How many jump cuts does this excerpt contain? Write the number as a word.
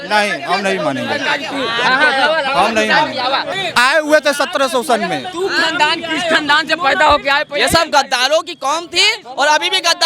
one